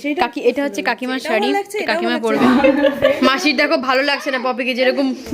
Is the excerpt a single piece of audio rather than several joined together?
no; 1 cut; at 2.4 s

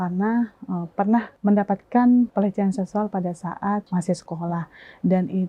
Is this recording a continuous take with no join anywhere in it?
no; 3 cuts; at 1.3 s, 2.3 s, 3.9 s

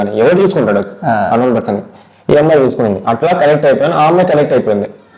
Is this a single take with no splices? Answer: yes; 0 cuts

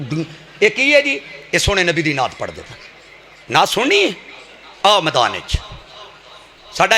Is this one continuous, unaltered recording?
yes; 0 cuts

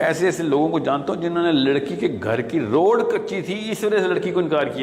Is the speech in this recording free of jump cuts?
yes; 0 cuts

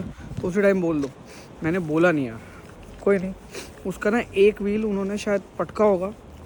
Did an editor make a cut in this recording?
no; 0 cuts

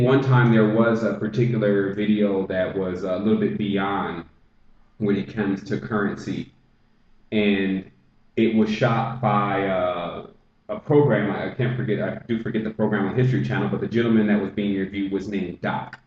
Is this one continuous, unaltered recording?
yes; 0 cuts

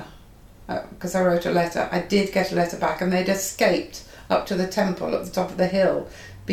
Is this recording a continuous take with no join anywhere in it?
yes; 0 cuts

